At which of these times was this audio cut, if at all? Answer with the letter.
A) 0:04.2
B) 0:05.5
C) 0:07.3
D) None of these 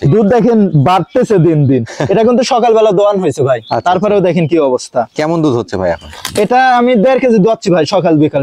D